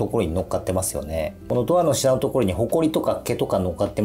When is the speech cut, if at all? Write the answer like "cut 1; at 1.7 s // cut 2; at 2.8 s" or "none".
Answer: cut 1; at 1.4 s